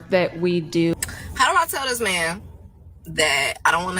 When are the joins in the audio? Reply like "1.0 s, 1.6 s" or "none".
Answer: 0.9 s